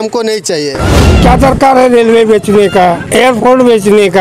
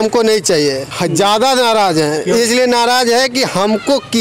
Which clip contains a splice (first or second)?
first